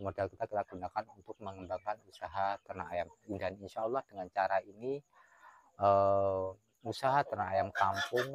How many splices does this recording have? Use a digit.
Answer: 0